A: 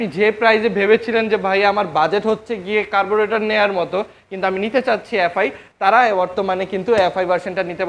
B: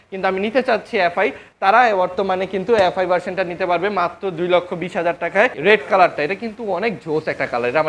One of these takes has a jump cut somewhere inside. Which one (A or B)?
B